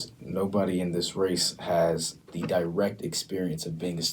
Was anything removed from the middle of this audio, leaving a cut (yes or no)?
yes